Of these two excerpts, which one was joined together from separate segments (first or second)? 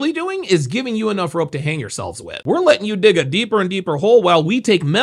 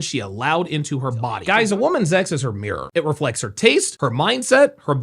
second